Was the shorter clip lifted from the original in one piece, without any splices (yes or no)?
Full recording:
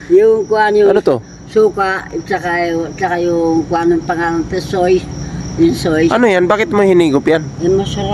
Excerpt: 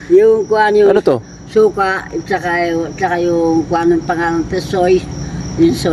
yes